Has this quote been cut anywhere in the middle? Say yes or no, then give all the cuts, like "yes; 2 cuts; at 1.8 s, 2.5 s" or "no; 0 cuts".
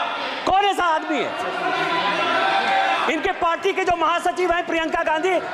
no; 0 cuts